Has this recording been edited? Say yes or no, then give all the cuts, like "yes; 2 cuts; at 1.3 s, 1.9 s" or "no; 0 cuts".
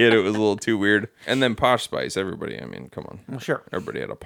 yes; 1 cut; at 1.2 s